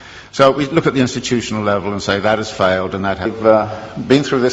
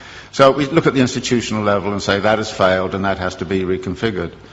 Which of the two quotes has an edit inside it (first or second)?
second